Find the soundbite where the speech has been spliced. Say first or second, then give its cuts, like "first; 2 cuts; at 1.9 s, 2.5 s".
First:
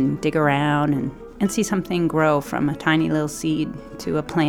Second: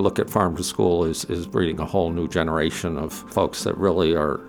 second; 1 cut; at 3.2 s